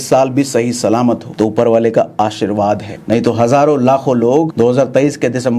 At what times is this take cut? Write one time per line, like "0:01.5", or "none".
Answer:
0:01.3
0:02.9
0:04.5